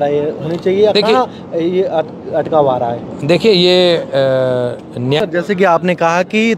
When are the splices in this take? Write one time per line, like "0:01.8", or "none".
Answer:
0:05.2